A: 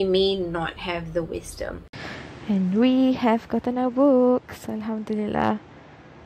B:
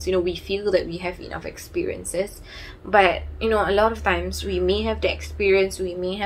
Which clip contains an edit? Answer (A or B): A